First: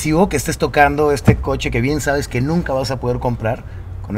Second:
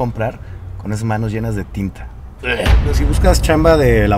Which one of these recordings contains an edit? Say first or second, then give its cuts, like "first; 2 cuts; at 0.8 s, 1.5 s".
second; 1 cut; at 3.0 s